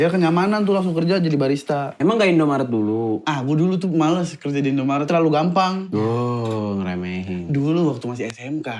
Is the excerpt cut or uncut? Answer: cut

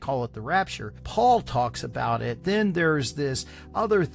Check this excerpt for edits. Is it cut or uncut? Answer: cut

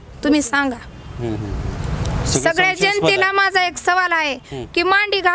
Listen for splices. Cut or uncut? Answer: uncut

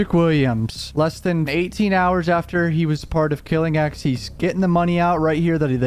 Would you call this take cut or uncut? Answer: cut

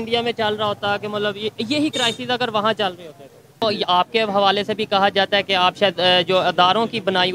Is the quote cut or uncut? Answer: cut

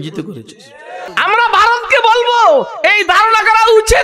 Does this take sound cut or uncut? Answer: cut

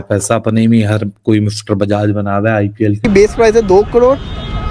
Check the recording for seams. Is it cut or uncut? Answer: cut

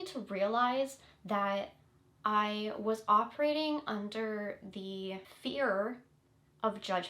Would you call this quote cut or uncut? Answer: cut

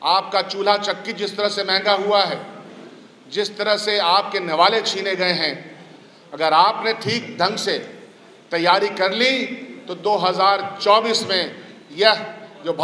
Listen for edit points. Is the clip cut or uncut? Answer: uncut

